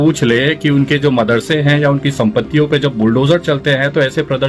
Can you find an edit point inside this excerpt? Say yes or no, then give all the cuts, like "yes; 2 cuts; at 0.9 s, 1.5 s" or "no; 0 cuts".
no; 0 cuts